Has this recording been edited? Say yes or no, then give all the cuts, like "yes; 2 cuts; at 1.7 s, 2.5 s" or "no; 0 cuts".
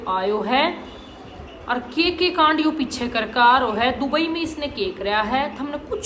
no; 0 cuts